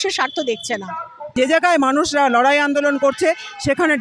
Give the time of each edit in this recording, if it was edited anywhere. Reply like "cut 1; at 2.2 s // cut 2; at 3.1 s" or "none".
cut 1; at 1.3 s